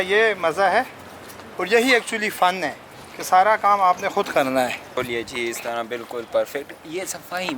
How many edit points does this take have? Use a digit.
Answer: 1